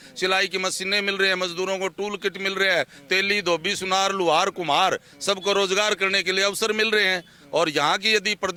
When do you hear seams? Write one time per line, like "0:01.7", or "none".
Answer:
none